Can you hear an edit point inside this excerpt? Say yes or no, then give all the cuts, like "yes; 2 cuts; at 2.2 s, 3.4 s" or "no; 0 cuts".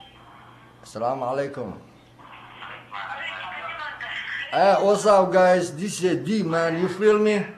no; 0 cuts